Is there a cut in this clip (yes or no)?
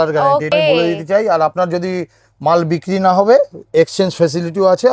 no